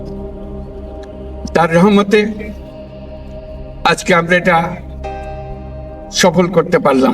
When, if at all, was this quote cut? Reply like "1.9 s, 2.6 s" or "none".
1.5 s